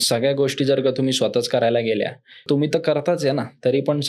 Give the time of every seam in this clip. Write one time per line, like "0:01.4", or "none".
0:02.4